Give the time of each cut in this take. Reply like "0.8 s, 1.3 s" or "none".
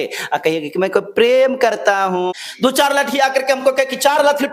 2.3 s